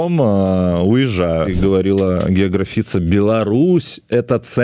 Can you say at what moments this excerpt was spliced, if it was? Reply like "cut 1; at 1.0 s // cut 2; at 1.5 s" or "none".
cut 1; at 1.5 s